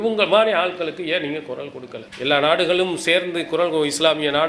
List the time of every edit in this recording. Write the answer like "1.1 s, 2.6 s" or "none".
2.0 s

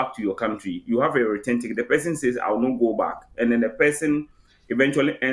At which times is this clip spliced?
none

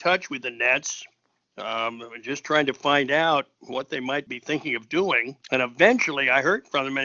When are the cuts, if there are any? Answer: 4.3 s, 5.3 s

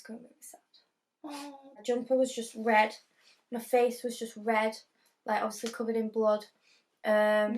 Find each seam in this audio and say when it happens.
1.8 s

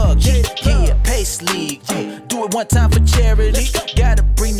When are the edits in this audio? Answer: none

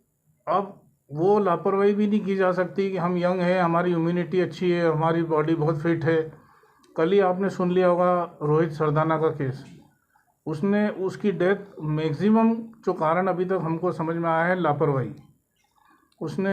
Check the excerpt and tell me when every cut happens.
none

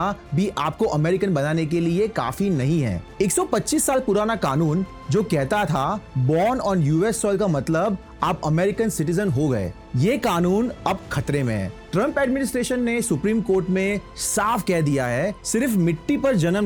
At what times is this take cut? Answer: none

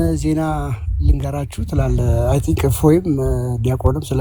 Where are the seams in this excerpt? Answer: none

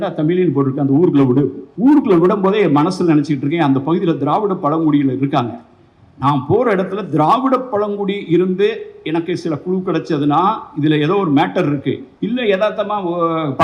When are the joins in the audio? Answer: 1.6 s, 12.1 s

